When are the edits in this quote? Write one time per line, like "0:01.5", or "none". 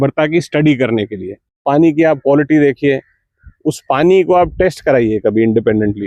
0:01.6